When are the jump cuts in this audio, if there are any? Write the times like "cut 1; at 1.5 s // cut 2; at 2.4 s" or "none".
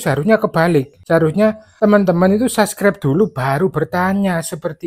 cut 1; at 1.3 s